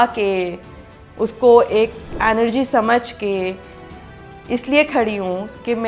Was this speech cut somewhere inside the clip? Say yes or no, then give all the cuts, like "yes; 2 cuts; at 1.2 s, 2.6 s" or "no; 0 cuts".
yes; 1 cut; at 2.0 s